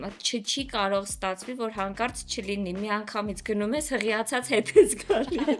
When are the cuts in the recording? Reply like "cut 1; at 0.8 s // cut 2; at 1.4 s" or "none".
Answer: none